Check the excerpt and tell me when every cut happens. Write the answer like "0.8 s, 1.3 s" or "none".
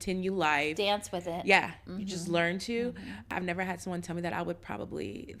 3.3 s